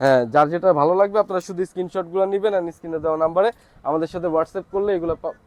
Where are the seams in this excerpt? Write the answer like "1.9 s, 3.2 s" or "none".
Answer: none